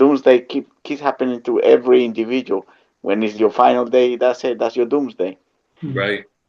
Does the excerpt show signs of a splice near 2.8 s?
no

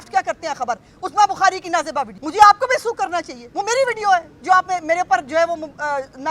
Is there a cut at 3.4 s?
yes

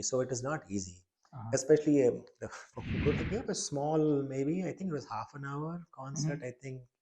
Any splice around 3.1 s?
yes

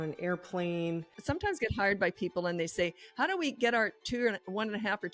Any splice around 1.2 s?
yes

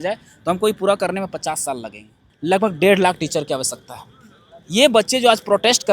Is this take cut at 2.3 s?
yes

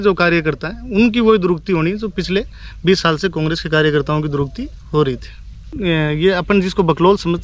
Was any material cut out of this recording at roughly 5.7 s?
yes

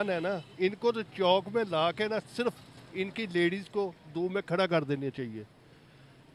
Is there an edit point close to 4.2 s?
no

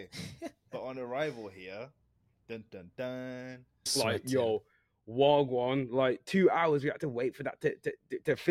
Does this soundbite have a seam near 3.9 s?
yes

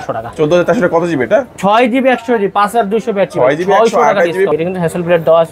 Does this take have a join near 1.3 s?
no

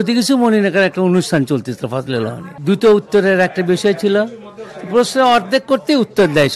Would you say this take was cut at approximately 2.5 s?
yes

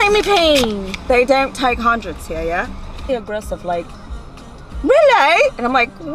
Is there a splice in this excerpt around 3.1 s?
yes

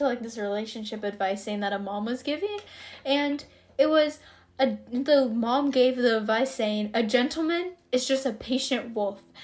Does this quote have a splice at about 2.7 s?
no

